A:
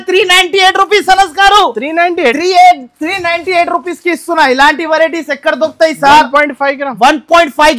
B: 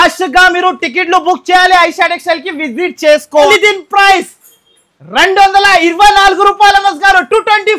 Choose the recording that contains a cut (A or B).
B